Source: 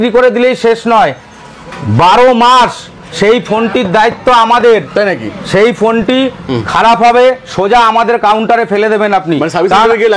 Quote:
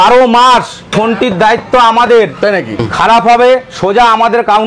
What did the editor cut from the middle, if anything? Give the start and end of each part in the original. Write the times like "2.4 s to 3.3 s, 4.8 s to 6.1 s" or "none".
3.0 s to 3.4 s, 5.3 s to 6.5 s